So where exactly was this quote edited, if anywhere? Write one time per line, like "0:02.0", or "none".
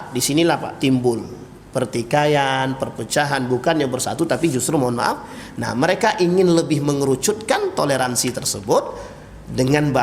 none